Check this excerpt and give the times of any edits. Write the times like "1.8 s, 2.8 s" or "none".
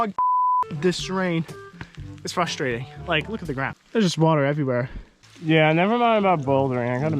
5.3 s